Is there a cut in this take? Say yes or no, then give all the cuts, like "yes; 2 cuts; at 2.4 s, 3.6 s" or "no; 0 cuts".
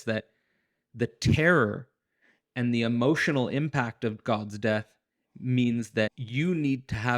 yes; 1 cut; at 6.2 s